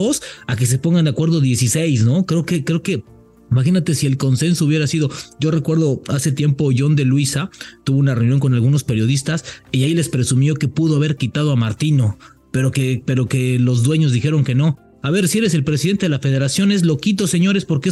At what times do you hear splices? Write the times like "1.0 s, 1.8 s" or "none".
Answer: none